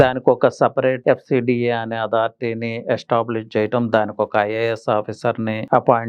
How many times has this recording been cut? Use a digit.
1